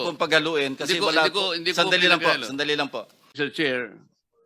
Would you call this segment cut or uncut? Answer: cut